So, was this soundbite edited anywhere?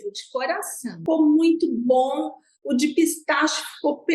yes; 1 cut; at 1.0 s

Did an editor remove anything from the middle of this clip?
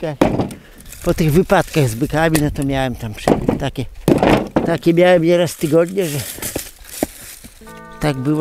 no; 0 cuts

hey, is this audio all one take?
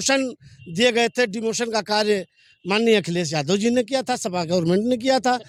yes; 0 cuts

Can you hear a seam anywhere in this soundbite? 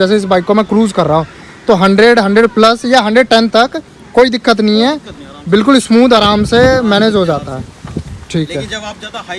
no; 0 cuts

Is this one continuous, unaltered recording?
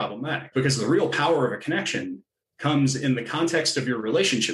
yes; 0 cuts

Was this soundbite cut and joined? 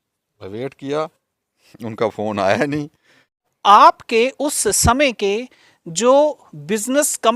yes; 1 cut; at 3.5 s

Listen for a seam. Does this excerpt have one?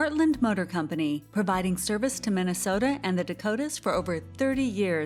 no; 0 cuts

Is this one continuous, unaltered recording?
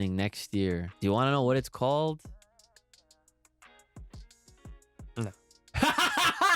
no; 1 cut; at 0.9 s

